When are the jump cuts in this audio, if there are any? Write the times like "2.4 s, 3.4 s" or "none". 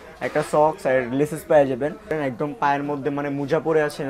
2.1 s